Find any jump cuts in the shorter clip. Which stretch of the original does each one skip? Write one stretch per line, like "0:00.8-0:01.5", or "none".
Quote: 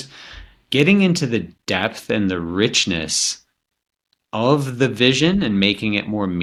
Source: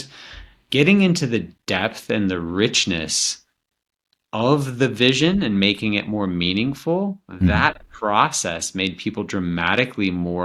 none